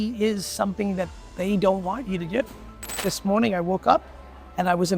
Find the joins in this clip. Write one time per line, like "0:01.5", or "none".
0:03.1